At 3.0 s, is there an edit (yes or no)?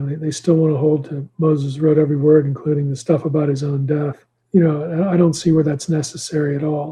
no